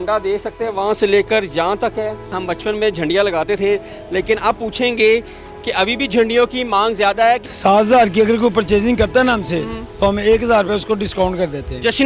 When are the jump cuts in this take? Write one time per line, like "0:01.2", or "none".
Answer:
0:02.4
0:07.5